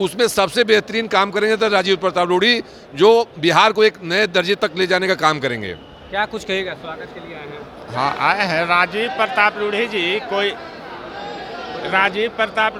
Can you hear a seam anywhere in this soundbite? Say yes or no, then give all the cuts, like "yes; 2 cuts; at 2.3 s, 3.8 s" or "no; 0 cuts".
no; 0 cuts